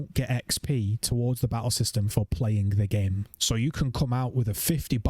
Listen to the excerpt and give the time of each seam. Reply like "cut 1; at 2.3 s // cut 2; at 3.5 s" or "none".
cut 1; at 3.3 s